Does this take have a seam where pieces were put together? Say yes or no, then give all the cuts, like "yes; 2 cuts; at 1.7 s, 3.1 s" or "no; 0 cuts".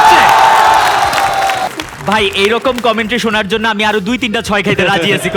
yes; 1 cut; at 1.7 s